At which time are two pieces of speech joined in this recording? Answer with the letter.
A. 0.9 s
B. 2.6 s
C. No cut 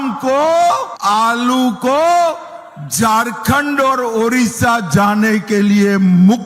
A